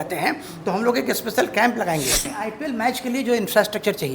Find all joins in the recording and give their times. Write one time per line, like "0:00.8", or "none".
0:02.3